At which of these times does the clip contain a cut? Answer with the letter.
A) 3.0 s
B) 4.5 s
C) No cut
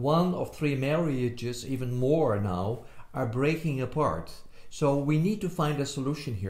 C